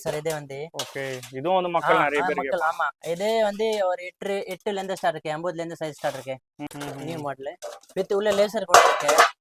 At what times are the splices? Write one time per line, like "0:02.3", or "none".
0:06.6